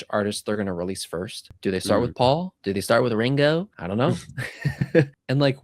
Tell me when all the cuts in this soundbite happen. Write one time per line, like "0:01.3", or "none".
0:01.4
0:02.5
0:03.8